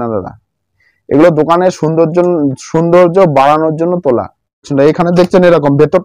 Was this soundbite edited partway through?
yes; 1 cut; at 4.7 s

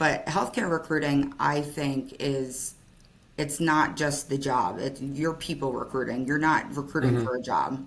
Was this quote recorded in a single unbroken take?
yes; 0 cuts

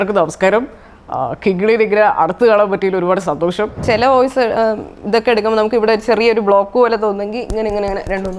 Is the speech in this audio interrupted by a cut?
yes; 1 cut; at 3.8 s

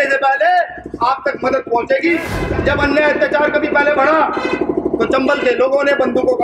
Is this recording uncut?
no; 1 cut; at 2.4 s

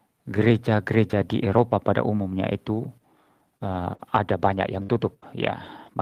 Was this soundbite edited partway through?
no; 0 cuts

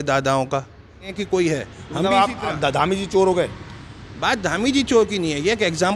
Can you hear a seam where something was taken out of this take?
yes; 1 cut; at 1.1 s

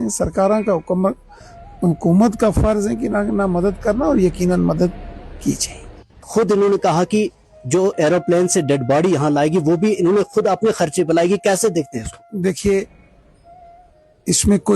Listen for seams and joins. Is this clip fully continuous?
no; 1 cut; at 6.3 s

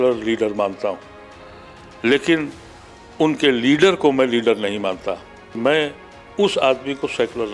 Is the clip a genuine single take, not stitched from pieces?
no; 1 cut; at 5.6 s

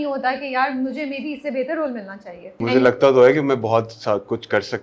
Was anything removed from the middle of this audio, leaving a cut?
yes; 1 cut; at 2.6 s

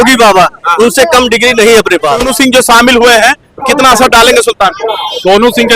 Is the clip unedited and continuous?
no; 1 cut; at 2.3 s

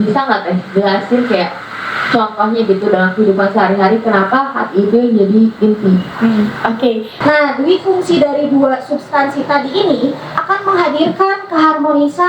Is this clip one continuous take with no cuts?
no; 1 cut; at 7.1 s

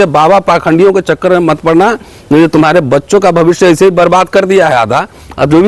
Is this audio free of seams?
yes; 0 cuts

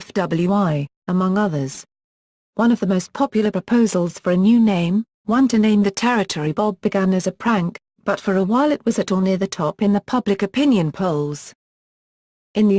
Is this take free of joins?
yes; 0 cuts

